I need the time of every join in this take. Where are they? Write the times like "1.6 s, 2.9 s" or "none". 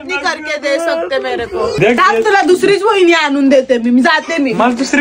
1.8 s